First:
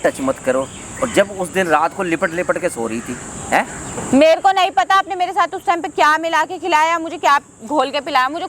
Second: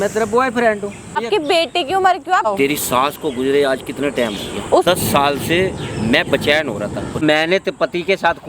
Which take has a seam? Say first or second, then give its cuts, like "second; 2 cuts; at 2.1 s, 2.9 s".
second; 4 cuts; at 1.2 s, 2.5 s, 4.8 s, 7.2 s